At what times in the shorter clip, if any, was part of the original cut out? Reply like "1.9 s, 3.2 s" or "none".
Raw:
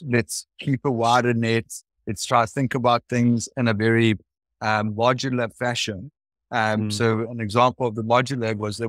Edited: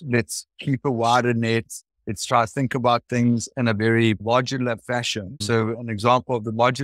4.2 s, 5.4 s

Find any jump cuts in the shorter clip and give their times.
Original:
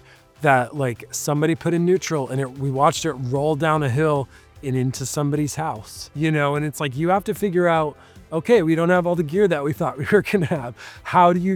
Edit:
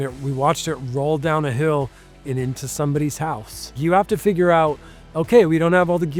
3.8 s

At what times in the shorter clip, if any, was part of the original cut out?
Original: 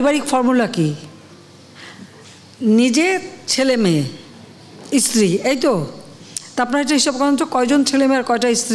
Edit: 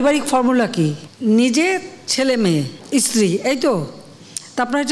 1.1 s, 2.8 s

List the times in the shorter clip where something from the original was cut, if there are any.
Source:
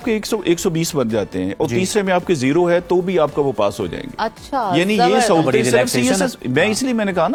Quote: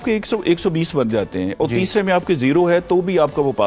none

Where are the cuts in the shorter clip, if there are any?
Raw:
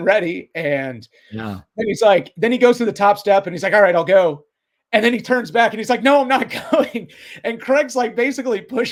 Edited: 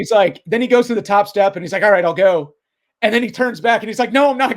none

